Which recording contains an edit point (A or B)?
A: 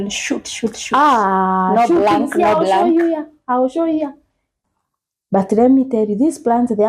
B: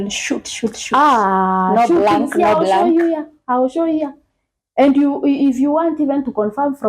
A